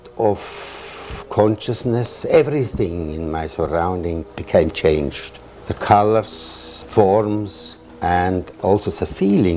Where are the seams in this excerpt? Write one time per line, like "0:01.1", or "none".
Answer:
none